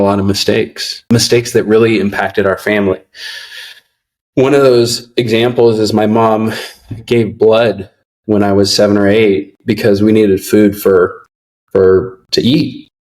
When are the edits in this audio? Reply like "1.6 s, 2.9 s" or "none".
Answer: 1.0 s